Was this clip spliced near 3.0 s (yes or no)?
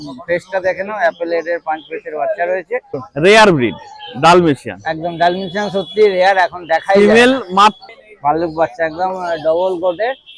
yes